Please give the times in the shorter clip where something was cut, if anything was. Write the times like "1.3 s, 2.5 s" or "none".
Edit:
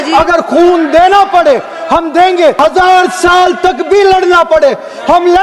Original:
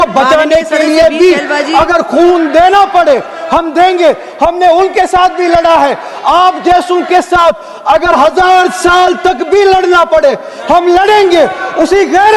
2.6 s